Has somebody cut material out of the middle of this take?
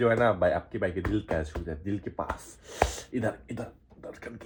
no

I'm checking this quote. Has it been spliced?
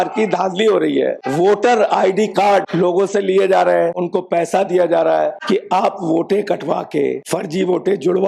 yes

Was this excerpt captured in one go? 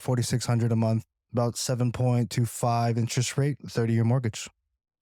yes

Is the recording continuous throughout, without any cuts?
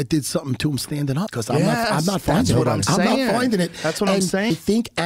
yes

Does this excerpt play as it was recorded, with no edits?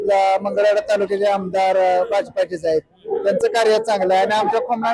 yes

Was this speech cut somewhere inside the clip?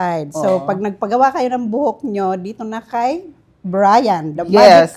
no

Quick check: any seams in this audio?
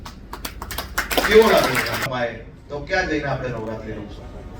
yes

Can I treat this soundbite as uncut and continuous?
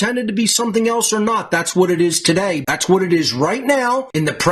no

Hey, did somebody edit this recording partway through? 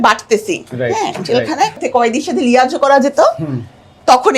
yes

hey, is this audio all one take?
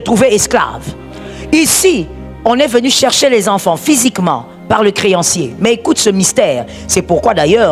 yes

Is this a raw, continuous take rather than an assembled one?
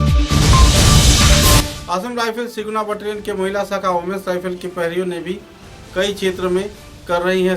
no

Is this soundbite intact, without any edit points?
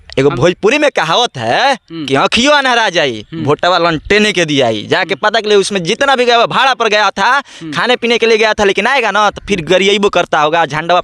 yes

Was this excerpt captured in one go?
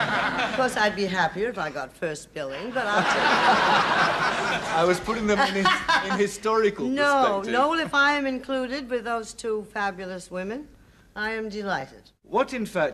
yes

